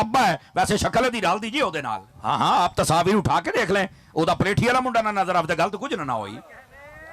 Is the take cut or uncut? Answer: cut